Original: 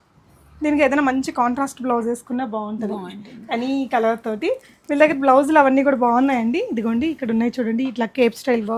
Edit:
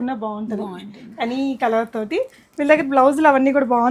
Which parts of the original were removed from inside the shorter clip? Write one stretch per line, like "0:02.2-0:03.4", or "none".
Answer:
none